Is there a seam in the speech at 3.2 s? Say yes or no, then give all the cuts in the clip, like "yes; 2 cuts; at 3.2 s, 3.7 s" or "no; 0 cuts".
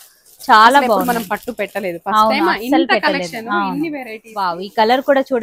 no; 1 cut; at 4.5 s